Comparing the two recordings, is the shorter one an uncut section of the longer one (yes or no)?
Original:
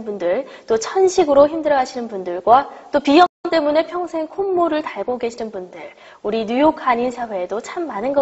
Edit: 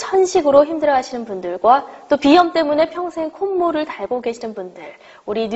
no